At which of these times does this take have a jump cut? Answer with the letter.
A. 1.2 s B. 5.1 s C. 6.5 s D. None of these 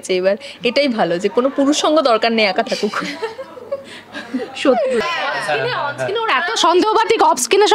B